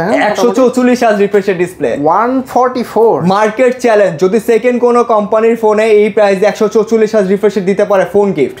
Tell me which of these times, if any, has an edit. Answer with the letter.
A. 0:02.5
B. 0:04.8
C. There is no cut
C